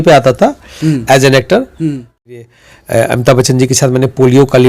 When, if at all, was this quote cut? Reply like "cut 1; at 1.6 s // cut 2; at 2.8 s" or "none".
cut 1; at 2.3 s